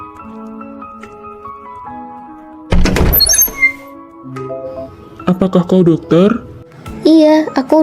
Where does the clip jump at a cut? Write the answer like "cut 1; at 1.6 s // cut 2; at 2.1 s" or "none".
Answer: cut 1; at 1.3 s